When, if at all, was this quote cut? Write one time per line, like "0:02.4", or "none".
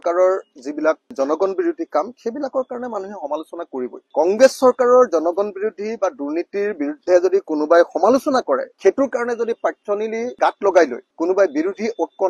none